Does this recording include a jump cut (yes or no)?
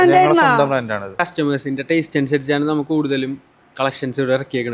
yes